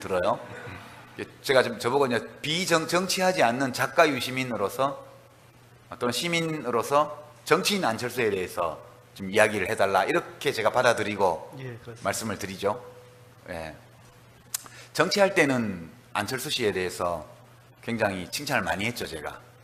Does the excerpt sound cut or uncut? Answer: uncut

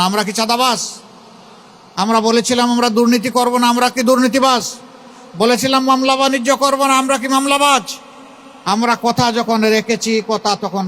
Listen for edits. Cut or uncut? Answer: uncut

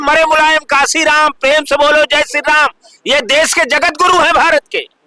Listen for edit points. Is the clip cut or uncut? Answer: uncut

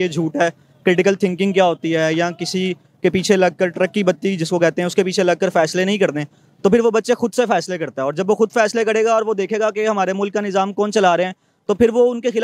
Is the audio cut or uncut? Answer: uncut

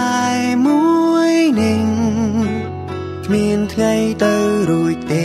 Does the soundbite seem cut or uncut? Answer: uncut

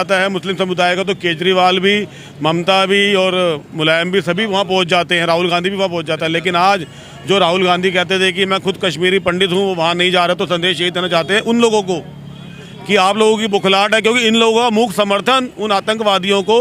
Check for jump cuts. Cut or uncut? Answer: uncut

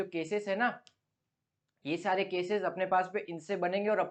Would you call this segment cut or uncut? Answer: uncut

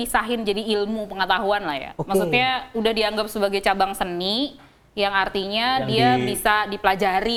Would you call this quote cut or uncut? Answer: uncut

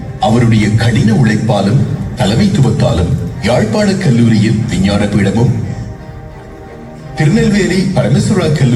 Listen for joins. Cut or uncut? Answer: uncut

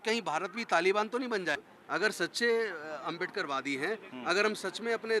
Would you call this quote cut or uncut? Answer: cut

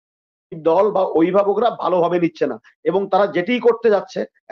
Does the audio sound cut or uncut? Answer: uncut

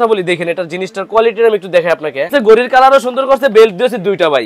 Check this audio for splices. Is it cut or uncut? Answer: cut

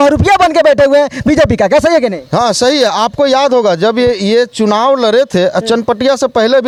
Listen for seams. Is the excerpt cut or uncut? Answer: uncut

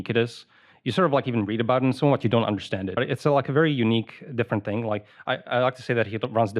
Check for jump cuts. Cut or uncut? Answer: cut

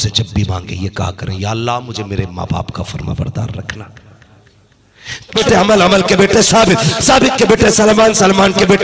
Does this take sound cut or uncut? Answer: cut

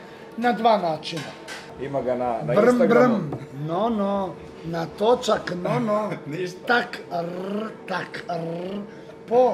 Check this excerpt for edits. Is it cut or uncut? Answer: cut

